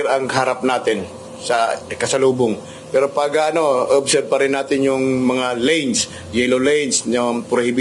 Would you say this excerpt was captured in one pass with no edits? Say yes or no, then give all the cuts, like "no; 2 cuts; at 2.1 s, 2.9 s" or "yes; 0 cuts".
yes; 0 cuts